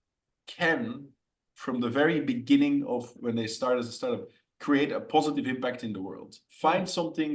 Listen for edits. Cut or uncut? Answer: cut